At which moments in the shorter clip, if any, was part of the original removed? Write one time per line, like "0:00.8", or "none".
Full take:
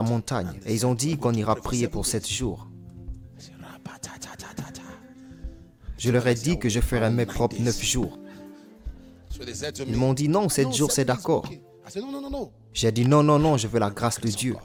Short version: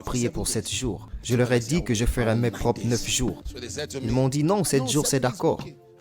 0:01.1
0:03.5